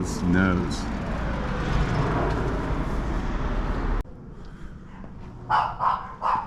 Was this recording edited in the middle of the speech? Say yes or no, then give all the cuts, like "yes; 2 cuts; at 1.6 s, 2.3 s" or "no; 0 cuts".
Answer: no; 0 cuts